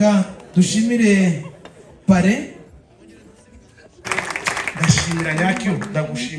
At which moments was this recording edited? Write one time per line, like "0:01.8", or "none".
0:04.0